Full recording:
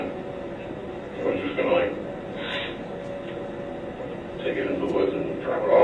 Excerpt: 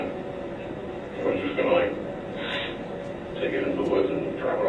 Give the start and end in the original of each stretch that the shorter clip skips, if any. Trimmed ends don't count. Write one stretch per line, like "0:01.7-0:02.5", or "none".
0:03.2-0:04.2